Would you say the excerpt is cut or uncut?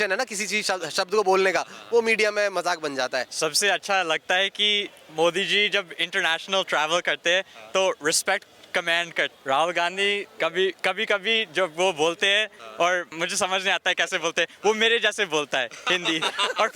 cut